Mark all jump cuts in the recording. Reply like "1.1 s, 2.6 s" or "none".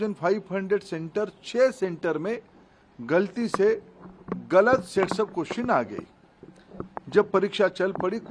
none

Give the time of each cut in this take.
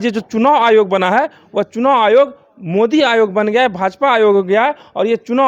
none

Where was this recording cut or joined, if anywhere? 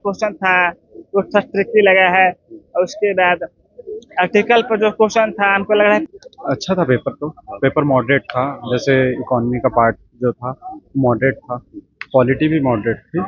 6.0 s

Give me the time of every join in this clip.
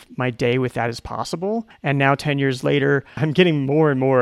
1.7 s, 3.2 s

